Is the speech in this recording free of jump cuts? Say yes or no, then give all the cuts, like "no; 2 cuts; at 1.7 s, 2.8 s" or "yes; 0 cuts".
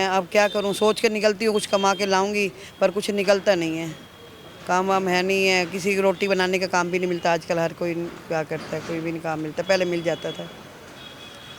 yes; 0 cuts